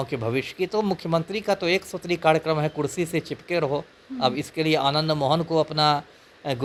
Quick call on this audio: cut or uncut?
uncut